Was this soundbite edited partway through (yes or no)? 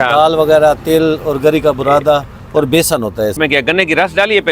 yes